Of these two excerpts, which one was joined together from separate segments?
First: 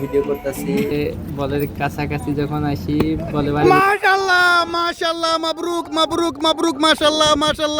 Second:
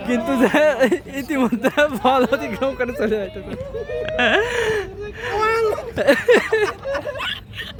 first; 1 cut; at 0.9 s

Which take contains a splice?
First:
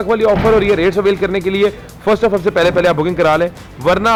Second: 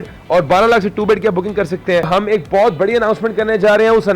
second; 1 cut; at 2.1 s

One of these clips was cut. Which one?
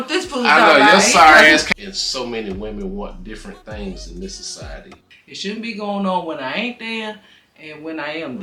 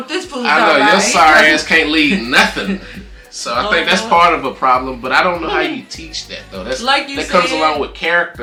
first; 2 cuts; at 1.7 s, 5.0 s

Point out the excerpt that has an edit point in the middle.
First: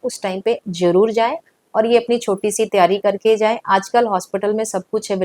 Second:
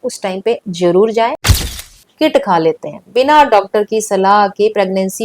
second; 1 cut; at 1.8 s

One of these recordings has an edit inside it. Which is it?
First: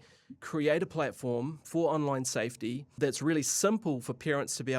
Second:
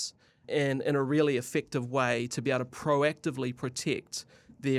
first; 1 cut; at 3.0 s

